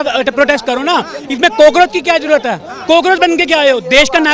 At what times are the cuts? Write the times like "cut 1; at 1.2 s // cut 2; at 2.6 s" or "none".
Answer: cut 1; at 2.7 s